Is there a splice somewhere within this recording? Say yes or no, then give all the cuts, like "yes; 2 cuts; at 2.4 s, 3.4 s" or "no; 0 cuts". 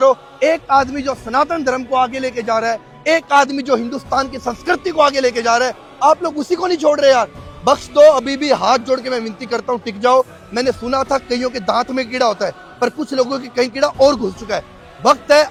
no; 0 cuts